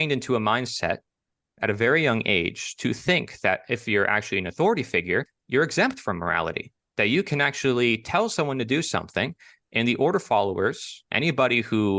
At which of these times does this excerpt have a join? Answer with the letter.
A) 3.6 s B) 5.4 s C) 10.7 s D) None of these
B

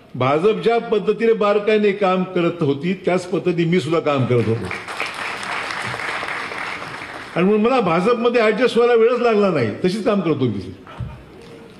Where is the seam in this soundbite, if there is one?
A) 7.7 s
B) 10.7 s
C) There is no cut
C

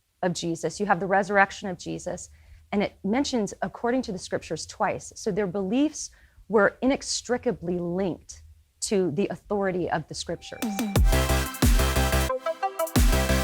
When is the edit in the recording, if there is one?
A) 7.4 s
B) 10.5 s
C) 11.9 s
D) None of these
B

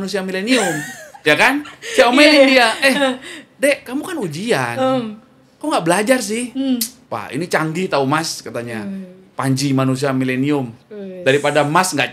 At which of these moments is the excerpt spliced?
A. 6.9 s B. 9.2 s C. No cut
A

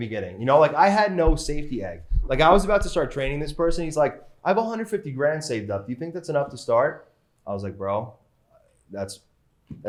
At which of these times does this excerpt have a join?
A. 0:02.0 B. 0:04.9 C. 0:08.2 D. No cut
D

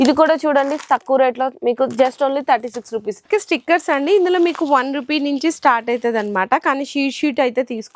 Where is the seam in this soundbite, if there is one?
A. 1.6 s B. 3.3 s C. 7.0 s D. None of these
B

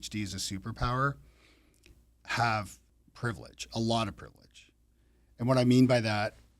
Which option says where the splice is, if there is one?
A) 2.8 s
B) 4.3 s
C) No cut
A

